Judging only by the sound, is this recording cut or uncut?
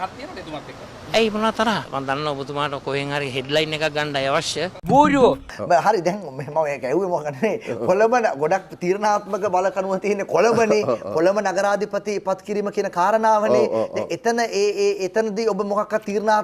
uncut